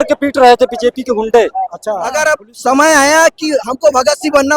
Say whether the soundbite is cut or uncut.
cut